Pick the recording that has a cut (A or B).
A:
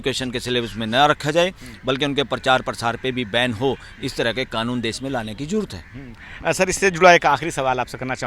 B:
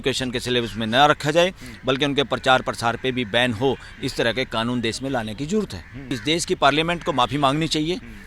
B